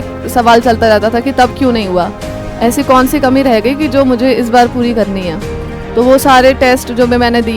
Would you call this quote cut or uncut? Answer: uncut